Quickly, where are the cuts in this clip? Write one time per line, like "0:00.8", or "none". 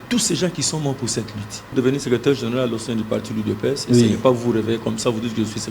0:01.7

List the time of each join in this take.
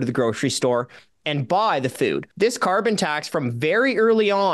0:02.3

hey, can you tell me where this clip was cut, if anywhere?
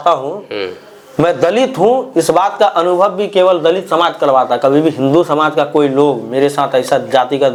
none

